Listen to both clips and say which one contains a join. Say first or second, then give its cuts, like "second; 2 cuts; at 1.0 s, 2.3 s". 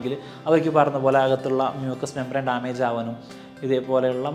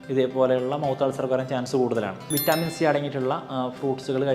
second; 1 cut; at 2.4 s